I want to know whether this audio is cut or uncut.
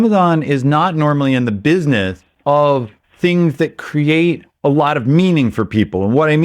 cut